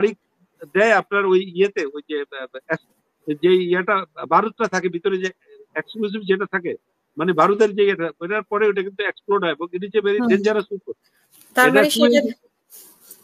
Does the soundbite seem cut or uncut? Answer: uncut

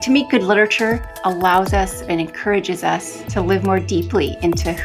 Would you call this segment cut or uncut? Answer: cut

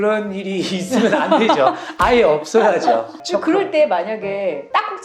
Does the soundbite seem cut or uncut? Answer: cut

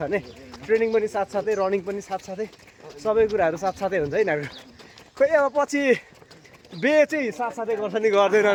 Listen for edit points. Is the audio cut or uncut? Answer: uncut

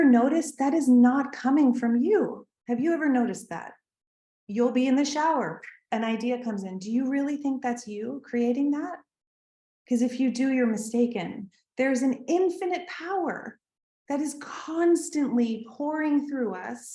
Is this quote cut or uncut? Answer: uncut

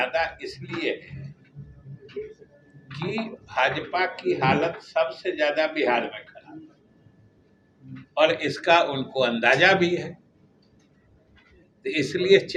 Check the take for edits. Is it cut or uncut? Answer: uncut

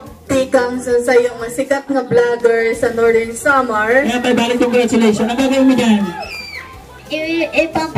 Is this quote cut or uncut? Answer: cut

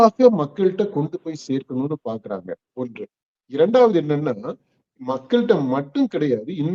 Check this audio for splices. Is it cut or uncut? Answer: uncut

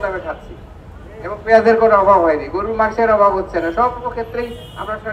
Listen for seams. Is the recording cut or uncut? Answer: uncut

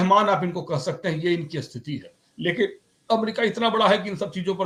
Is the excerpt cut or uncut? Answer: uncut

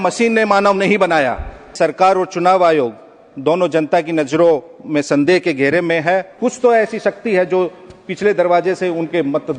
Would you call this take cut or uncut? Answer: cut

